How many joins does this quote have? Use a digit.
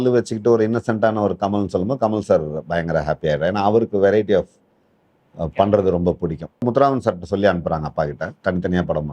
1